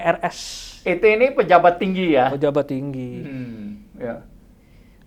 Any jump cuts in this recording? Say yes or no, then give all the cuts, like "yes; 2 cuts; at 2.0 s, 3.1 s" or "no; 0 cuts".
no; 0 cuts